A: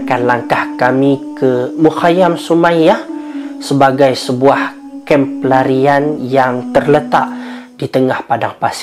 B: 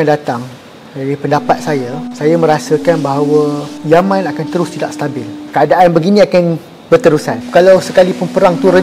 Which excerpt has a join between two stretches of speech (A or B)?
B